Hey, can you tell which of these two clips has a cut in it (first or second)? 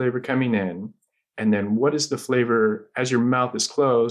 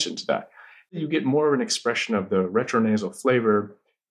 second